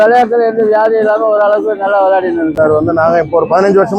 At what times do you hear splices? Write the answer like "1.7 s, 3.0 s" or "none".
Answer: 2.5 s